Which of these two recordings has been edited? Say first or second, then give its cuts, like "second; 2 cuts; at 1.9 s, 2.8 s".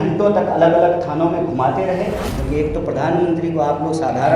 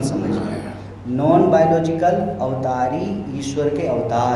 first; 1 cut; at 2.3 s